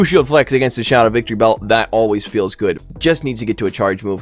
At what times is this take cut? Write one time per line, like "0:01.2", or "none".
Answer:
0:02.9